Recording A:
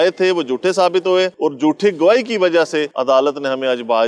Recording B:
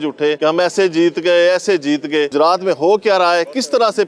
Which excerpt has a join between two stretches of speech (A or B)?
B